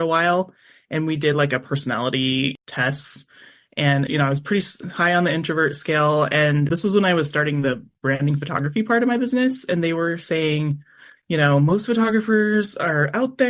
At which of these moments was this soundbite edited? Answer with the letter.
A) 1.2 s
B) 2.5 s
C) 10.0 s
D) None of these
B